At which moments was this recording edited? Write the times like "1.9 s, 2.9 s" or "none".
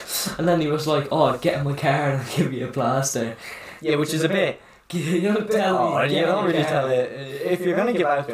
none

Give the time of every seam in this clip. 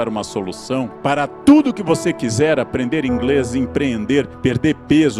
0.9 s, 4.3 s

